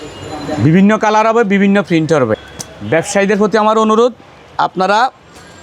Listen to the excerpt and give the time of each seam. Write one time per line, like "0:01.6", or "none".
0:02.4